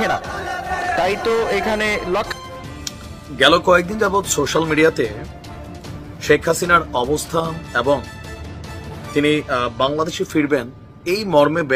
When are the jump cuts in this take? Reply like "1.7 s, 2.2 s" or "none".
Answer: none